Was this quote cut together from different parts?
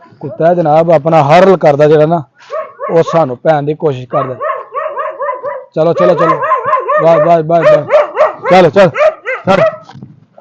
no; 0 cuts

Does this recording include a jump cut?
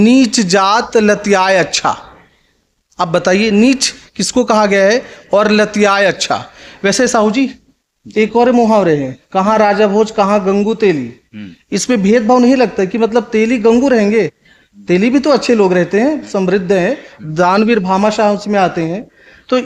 no; 0 cuts

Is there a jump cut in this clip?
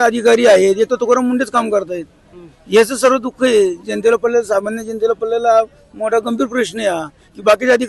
no; 0 cuts

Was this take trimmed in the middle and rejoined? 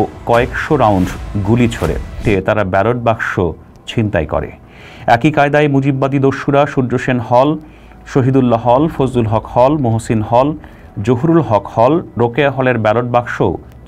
yes; 1 cut; at 2.2 s

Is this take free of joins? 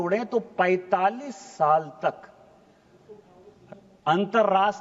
yes; 0 cuts

